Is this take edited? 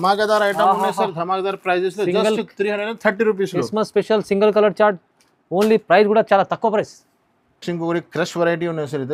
no; 0 cuts

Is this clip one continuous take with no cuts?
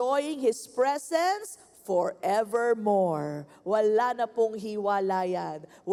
yes; 0 cuts

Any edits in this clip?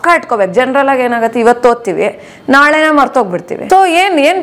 yes; 1 cut; at 3.5 s

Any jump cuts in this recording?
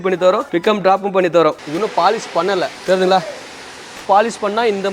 yes; 3 cuts; at 1.6 s, 2.7 s, 4.0 s

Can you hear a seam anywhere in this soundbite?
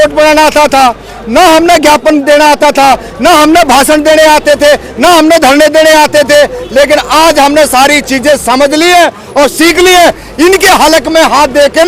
no; 0 cuts

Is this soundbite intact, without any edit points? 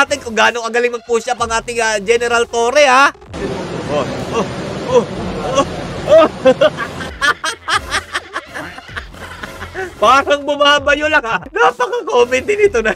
no; 1 cut; at 11.4 s

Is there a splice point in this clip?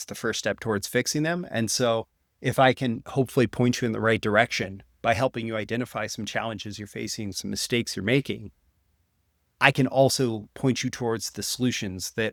no; 0 cuts

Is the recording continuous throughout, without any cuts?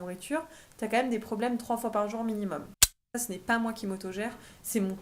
no; 1 cut; at 2.8 s

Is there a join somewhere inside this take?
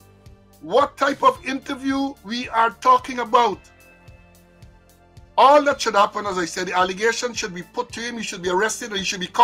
no; 0 cuts

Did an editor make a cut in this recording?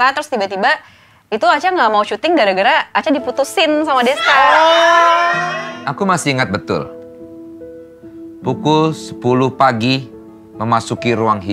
yes; 1 cut; at 5.5 s

